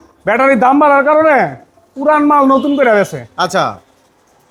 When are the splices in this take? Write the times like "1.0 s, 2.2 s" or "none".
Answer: none